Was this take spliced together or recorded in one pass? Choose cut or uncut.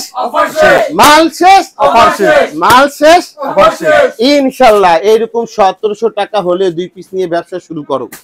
uncut